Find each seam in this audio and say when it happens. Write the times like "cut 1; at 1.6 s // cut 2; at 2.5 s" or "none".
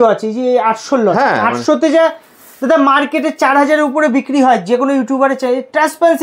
none